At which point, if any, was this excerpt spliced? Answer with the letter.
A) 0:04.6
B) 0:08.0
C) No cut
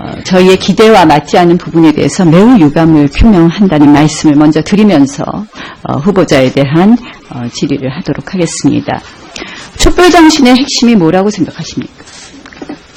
C